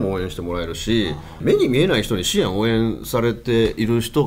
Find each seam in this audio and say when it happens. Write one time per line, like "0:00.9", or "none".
0:01.3